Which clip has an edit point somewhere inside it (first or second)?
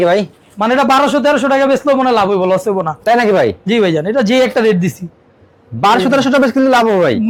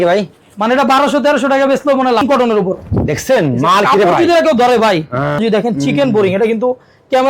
second